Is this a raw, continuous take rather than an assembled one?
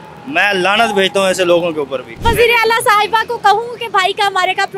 no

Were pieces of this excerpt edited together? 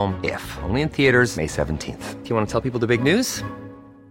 no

